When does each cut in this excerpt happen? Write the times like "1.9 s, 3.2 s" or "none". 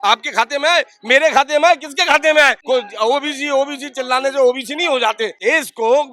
2.6 s, 5.4 s

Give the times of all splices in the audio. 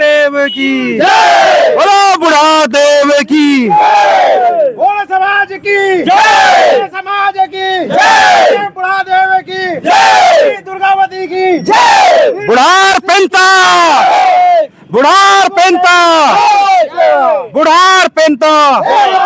none

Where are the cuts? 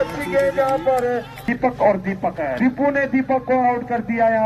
1.4 s, 2.6 s

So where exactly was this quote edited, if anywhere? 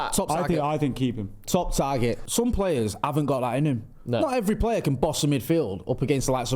2.2 s

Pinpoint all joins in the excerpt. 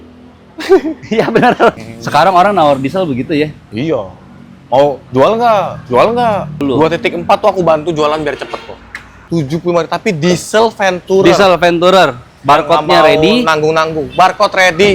1.8 s, 6.5 s, 9.1 s

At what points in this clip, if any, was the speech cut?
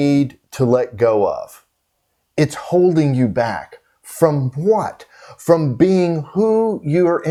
none

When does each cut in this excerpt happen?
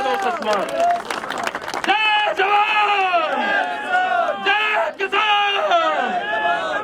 none

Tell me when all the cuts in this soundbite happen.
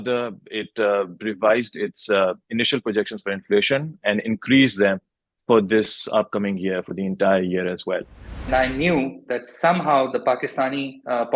8.4 s

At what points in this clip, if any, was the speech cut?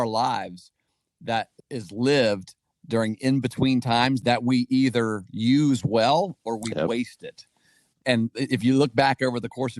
1.6 s, 4.2 s, 8.0 s

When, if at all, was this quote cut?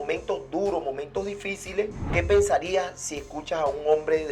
2.1 s

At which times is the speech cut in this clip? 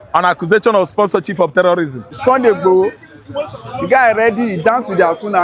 2.3 s

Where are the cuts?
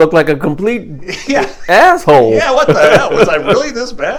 none

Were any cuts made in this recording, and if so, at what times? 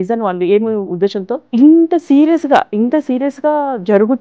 1.4 s

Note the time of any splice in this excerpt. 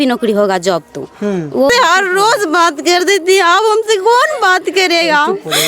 1.7 s

